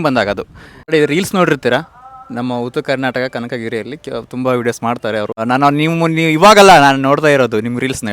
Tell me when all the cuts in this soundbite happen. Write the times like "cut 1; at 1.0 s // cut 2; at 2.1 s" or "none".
cut 1; at 0.9 s // cut 2; at 5.4 s